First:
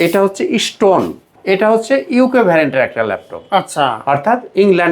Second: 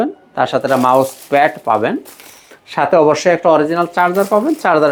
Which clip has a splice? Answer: first; 1 cut; at 1.3 s

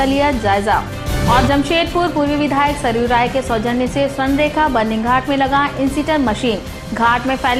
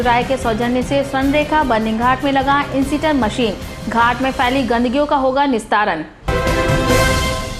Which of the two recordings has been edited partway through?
second; 1 cut; at 6.1 s

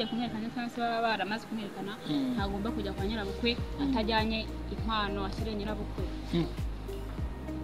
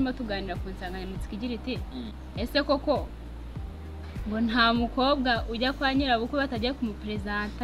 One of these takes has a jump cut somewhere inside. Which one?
second; 1 cut; at 2.2 s

